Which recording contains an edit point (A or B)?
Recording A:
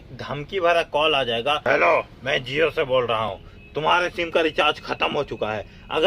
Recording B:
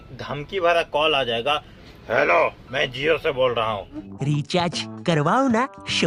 A